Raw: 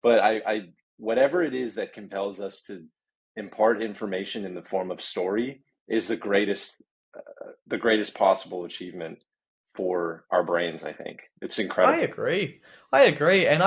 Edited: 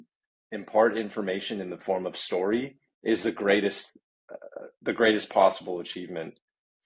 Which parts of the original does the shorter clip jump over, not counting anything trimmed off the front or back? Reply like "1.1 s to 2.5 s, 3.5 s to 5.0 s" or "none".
none